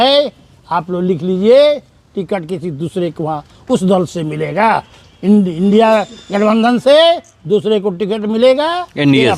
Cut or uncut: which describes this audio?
uncut